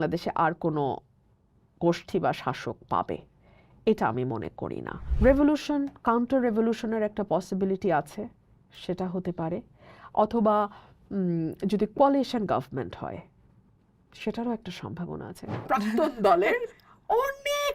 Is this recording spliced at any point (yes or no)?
yes